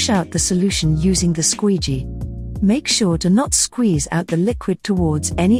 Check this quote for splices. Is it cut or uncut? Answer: uncut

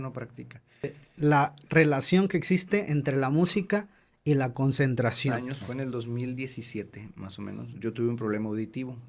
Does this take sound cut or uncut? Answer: cut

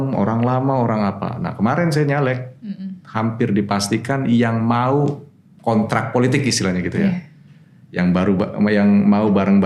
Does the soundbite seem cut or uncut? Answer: uncut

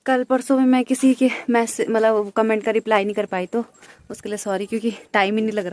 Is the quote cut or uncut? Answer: uncut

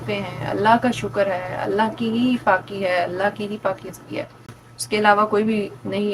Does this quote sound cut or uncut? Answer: uncut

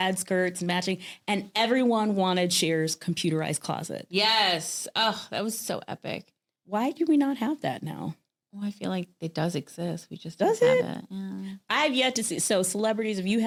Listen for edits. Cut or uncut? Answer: uncut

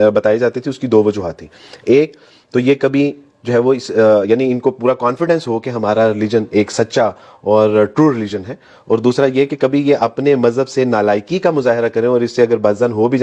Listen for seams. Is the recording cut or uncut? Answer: uncut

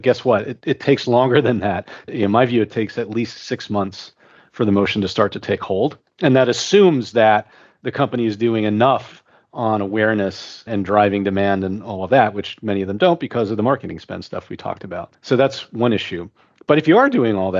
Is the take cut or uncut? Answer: uncut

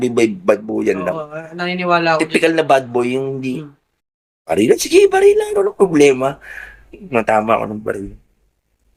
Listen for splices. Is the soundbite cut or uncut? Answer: uncut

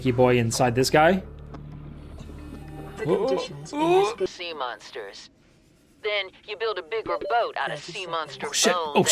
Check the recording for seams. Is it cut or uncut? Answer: cut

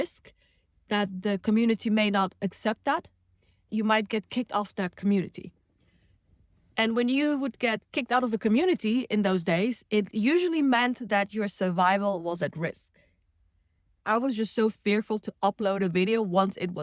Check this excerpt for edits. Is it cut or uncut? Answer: cut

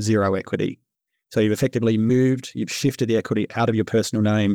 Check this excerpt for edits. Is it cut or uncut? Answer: cut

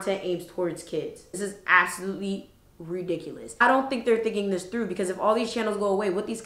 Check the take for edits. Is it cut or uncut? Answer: cut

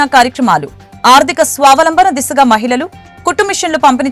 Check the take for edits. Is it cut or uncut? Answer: uncut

